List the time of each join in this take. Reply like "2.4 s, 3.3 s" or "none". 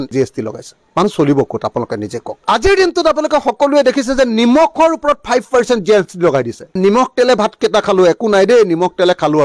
none